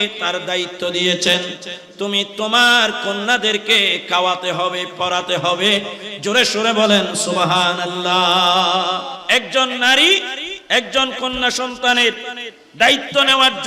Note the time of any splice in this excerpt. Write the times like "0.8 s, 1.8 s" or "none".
9.1 s